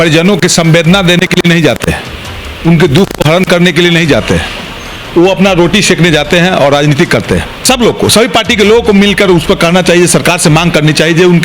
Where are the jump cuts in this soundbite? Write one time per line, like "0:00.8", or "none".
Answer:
0:07.5